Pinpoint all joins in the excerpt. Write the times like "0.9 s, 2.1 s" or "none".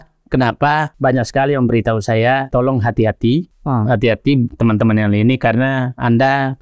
0.9 s, 2.5 s, 3.5 s